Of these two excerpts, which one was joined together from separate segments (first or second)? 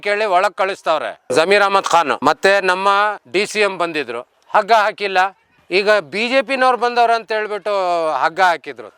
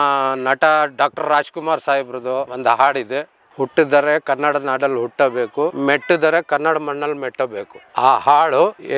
second